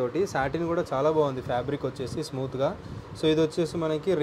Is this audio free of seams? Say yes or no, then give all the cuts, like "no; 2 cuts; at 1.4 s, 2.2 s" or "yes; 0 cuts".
yes; 0 cuts